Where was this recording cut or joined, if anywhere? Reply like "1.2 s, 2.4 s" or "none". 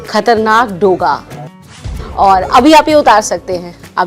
1.7 s

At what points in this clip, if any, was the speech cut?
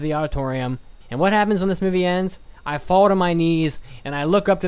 0.9 s

